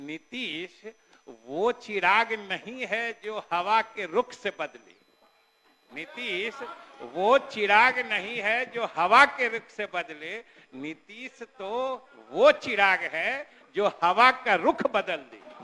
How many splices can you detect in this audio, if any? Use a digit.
0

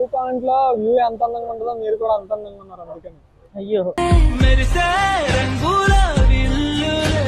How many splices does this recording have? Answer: 0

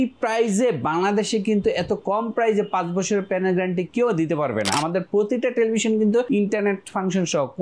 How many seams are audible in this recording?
2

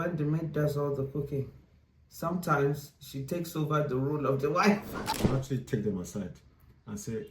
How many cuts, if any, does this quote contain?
1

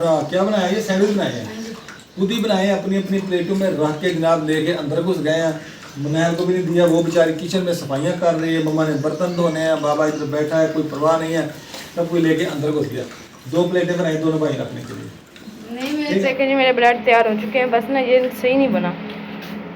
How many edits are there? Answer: 1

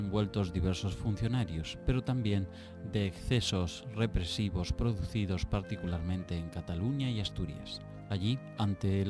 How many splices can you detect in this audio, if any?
0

